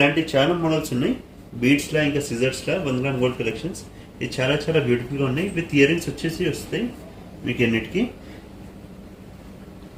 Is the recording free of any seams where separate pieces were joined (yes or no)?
yes